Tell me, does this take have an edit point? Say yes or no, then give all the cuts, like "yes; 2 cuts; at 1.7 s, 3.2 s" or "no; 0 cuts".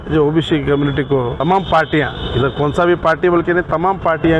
yes; 1 cut; at 1.3 s